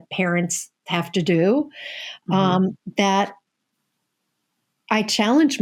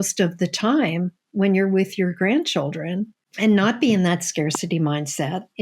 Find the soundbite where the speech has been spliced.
second; 1 cut; at 3.2 s

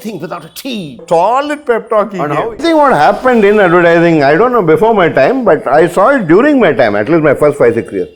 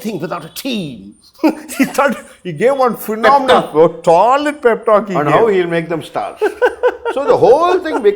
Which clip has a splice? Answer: first; 2 cuts; at 1.0 s, 2.6 s

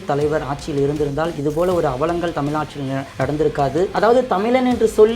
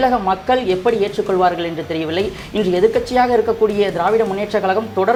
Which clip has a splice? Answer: first; 2 cuts; at 3.1 s, 3.9 s

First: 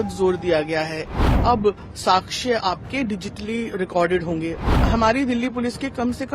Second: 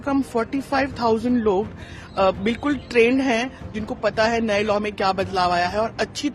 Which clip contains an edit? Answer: first; 2 cuts; at 1.0 s, 4.8 s

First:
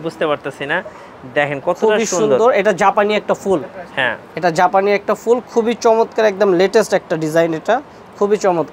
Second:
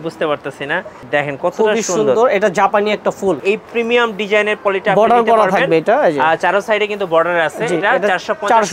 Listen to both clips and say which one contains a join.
second; 2 cuts; at 0.9 s, 3.4 s

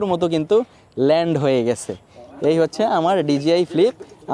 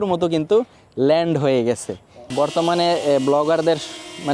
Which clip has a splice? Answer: second; 1 cut; at 2.2 s

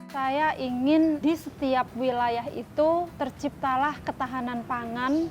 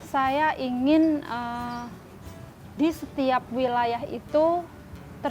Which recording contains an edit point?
first; 2 cuts; at 1.2 s, 3.1 s

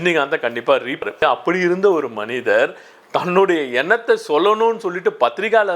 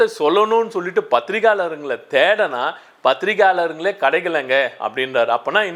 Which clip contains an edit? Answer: first; 1 cut; at 1.0 s

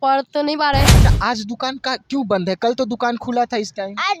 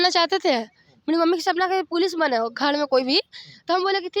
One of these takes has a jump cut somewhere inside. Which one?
first; 1 cut; at 0.9 s

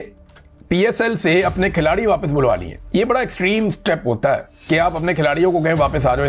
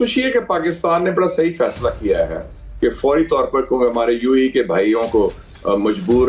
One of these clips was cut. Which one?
first; 1 cut; at 2.7 s

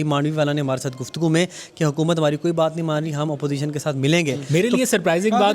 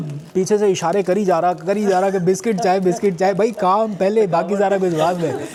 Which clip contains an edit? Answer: first; 1 cut; at 4.4 s

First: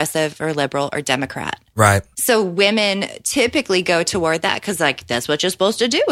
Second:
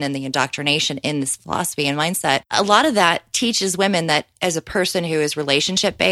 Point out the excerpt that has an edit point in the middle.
second; 1 cut; at 2.5 s

